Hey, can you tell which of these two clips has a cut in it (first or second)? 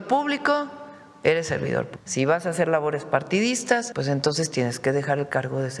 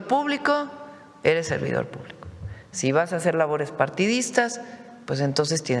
first